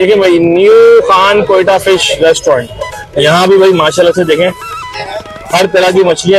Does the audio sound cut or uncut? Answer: uncut